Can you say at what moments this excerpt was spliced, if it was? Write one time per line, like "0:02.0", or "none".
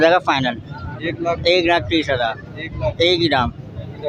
none